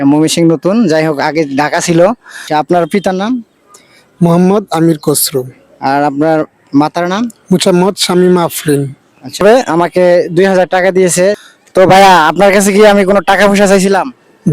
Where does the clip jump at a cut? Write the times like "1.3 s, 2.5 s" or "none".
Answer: 2.3 s, 9.4 s, 11.4 s